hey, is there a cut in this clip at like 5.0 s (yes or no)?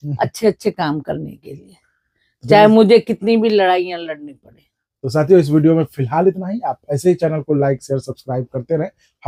no